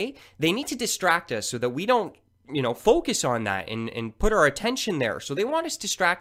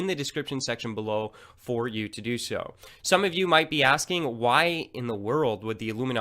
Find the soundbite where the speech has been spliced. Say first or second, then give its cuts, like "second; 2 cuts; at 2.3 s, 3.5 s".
second; 1 cut; at 1.3 s